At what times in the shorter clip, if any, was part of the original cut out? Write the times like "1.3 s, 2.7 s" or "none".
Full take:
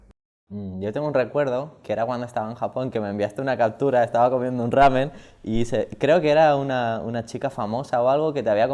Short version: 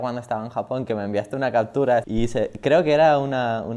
2.0 s